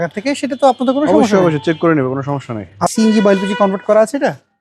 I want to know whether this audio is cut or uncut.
cut